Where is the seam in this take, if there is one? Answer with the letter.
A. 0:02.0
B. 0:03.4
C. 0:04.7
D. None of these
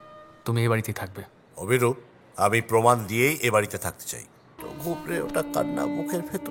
C